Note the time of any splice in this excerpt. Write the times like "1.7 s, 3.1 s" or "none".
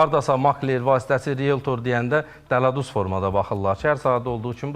none